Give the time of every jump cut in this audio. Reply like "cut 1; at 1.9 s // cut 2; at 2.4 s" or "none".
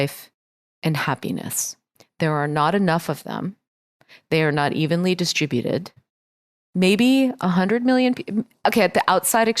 cut 1; at 6.7 s